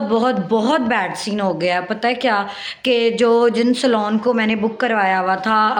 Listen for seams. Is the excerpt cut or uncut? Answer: cut